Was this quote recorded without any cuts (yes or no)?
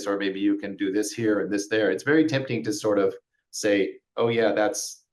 yes